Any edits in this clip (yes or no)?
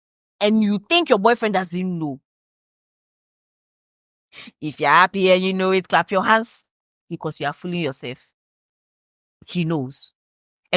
no